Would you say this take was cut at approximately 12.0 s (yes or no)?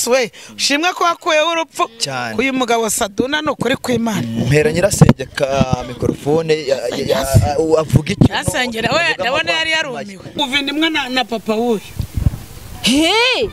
no